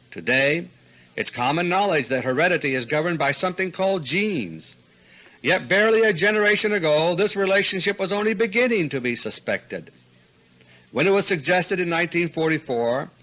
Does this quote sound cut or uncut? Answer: uncut